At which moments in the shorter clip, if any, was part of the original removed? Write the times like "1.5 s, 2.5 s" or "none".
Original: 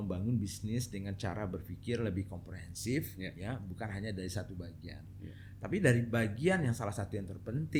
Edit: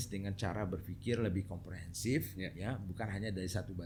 none